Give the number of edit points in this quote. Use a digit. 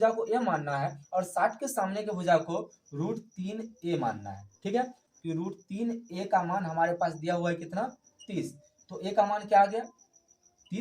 1